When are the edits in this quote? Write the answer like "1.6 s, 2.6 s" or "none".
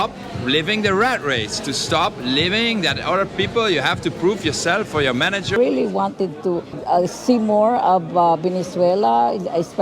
5.6 s, 6.7 s